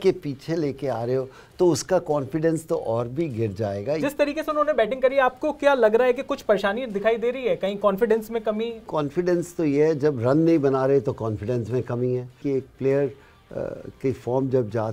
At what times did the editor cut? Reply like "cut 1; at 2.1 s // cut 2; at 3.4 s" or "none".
cut 1; at 4.0 s // cut 2; at 8.9 s // cut 3; at 12.4 s